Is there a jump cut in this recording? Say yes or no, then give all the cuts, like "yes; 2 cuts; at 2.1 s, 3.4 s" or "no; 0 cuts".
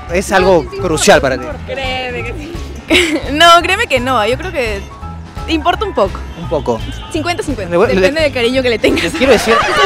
no; 0 cuts